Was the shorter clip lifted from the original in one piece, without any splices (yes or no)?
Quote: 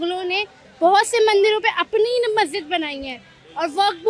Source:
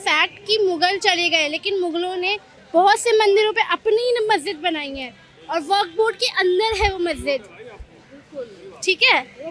yes